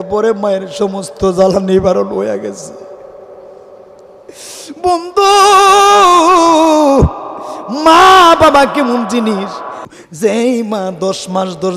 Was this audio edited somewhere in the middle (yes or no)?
yes